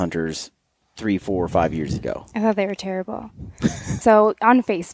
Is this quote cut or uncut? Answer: cut